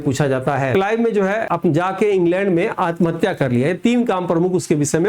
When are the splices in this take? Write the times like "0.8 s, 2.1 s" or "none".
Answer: 0.7 s, 1.4 s